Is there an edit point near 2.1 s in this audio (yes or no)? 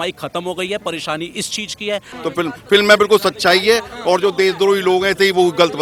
yes